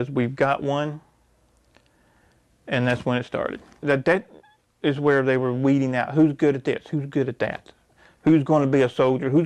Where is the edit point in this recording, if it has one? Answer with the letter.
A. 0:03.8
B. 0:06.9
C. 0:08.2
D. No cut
A